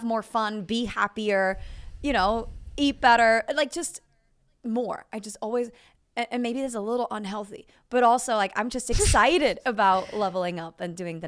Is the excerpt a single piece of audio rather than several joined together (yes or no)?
yes